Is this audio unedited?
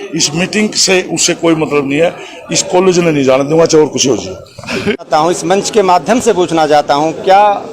no; 1 cut; at 5.1 s

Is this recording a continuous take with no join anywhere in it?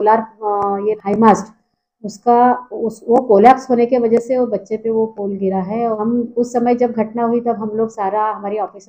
no; 2 cuts; at 1.0 s, 6.0 s

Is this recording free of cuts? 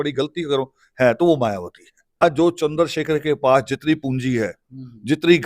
no; 1 cut; at 2.2 s

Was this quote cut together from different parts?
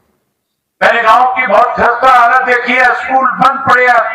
no; 0 cuts

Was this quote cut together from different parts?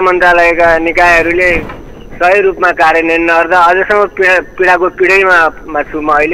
no; 0 cuts

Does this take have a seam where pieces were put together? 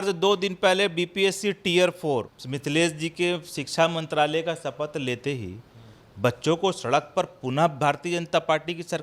yes; 1 cut; at 2.4 s

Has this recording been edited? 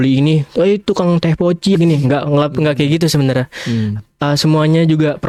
no; 0 cuts

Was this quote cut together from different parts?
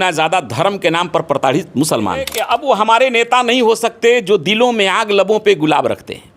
yes; 1 cut; at 2.4 s

